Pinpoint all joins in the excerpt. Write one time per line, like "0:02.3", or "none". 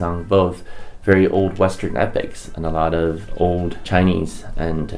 0:03.8